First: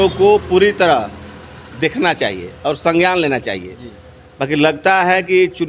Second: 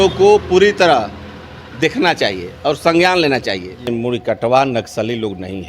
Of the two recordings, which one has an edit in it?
second; 1 cut; at 3.9 s

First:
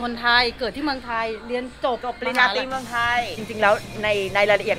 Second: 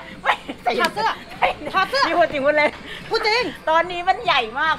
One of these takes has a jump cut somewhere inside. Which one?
first; 1 cut; at 3.5 s

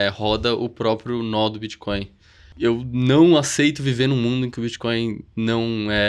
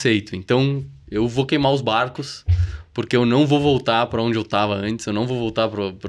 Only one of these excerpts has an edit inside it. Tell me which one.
first; 1 cut; at 2.5 s

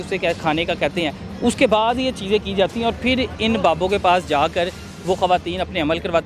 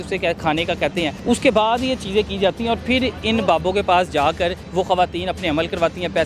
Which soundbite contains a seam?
second; 2 cuts; at 1.2 s, 4.6 s

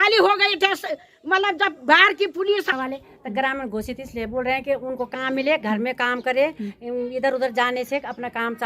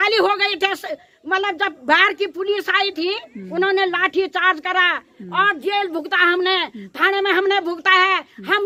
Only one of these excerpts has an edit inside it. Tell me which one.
first; 1 cut; at 2.7 s

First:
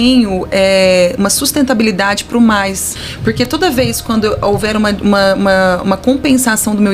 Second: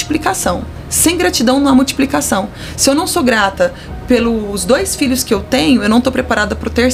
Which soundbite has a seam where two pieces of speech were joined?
first; 1 cut; at 2.9 s

